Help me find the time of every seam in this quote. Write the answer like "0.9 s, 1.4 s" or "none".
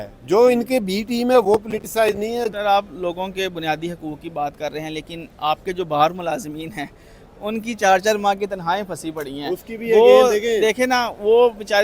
2.5 s